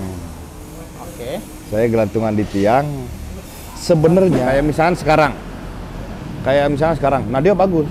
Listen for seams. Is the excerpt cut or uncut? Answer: cut